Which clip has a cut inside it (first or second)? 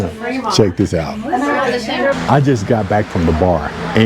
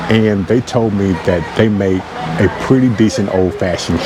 first